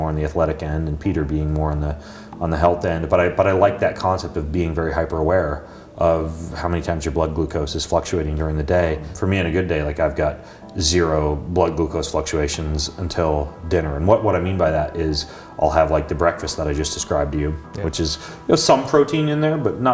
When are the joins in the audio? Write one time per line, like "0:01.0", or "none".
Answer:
0:09.1